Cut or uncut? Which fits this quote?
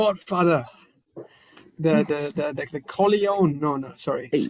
uncut